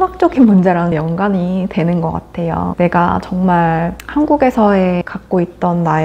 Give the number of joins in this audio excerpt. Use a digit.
0